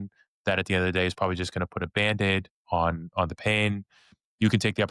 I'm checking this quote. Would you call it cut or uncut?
uncut